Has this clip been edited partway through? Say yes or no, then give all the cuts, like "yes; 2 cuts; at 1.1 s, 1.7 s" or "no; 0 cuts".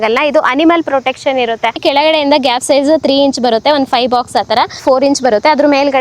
yes; 2 cuts; at 1.8 s, 4.8 s